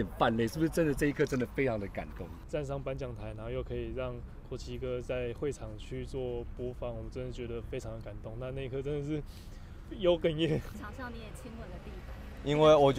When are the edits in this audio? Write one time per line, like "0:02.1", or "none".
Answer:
0:02.4
0:10.8